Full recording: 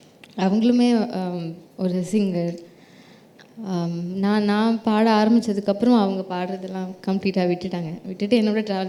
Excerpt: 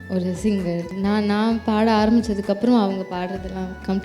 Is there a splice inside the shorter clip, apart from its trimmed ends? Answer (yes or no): yes